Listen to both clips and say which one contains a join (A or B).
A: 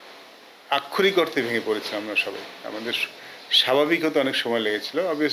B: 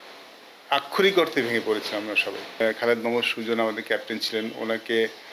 B